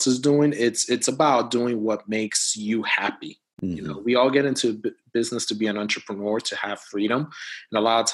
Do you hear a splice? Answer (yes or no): no